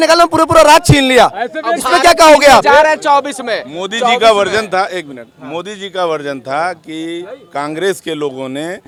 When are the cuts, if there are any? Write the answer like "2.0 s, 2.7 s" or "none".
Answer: none

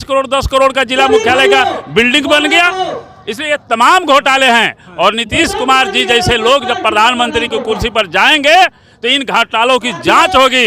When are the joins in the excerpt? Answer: none

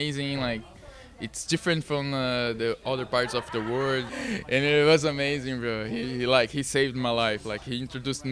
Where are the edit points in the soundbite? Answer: 4.1 s

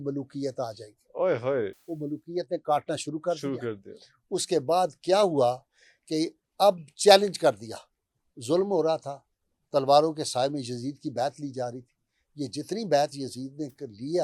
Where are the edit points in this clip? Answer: none

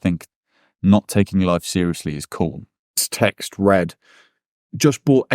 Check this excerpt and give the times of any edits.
3.0 s

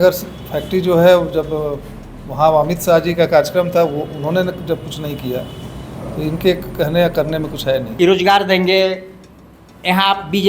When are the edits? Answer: 7.9 s

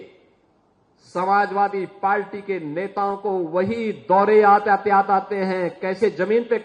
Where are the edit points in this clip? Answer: none

